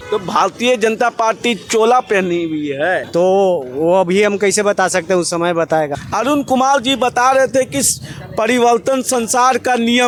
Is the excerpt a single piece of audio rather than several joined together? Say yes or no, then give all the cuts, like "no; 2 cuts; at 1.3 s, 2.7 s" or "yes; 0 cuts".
yes; 0 cuts